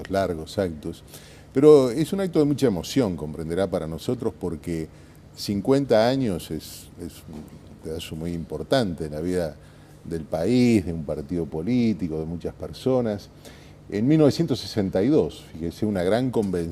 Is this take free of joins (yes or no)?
no